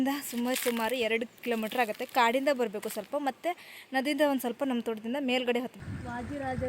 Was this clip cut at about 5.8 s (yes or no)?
yes